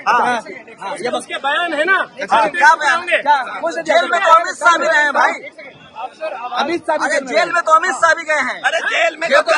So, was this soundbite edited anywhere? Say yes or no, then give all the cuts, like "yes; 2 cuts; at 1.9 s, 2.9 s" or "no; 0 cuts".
no; 0 cuts